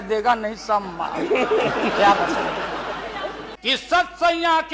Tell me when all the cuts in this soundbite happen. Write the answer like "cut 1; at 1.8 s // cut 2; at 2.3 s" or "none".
cut 1; at 3.5 s